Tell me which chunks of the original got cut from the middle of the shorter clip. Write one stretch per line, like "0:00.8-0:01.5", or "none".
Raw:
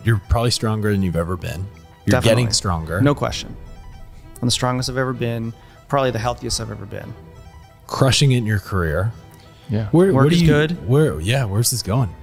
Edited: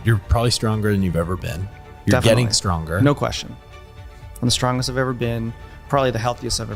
none